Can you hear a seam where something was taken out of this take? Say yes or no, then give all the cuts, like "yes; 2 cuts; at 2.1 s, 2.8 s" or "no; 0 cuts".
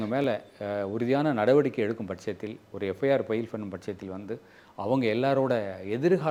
no; 0 cuts